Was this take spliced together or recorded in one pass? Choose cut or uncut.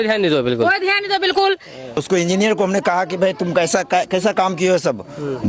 cut